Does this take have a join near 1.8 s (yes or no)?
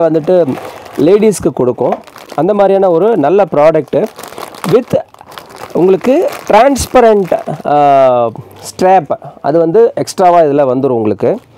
no